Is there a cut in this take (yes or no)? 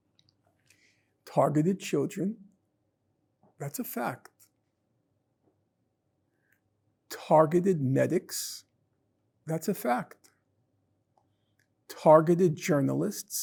no